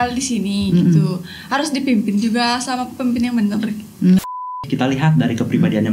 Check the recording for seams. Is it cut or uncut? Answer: cut